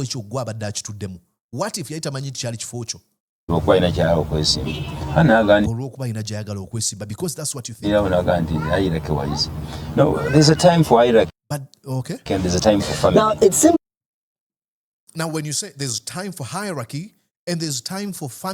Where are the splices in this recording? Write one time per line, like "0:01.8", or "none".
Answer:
none